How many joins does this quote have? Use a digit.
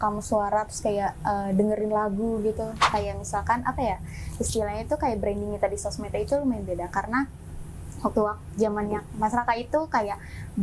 1